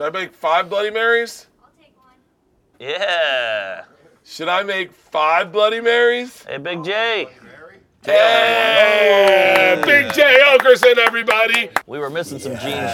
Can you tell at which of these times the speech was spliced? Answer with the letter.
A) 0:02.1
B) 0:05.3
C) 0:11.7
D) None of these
C